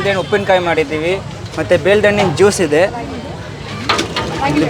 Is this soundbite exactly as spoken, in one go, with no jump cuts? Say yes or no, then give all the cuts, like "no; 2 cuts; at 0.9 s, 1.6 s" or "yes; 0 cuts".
yes; 0 cuts